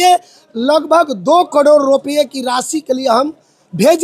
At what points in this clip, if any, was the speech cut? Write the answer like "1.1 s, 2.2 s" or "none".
none